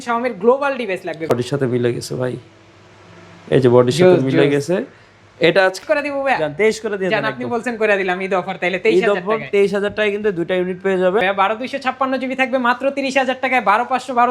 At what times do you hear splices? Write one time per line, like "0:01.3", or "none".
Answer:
0:01.3
0:05.8
0:11.2